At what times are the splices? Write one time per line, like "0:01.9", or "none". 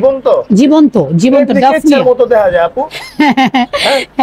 none